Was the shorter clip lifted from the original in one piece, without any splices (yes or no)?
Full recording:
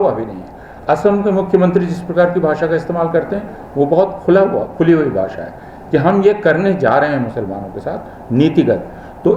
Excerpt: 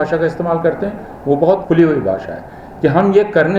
no